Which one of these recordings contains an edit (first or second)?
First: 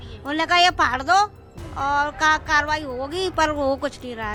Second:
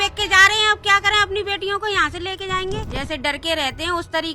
second